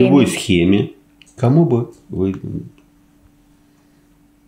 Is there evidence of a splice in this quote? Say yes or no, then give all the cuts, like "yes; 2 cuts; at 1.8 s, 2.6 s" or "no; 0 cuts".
no; 0 cuts